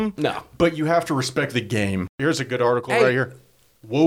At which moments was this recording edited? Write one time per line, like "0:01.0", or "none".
0:02.1

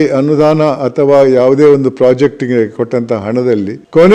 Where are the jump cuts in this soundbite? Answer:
none

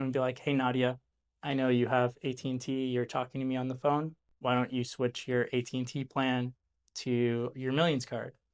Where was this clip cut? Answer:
none

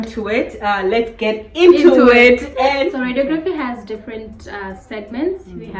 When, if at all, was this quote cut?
0:02.8

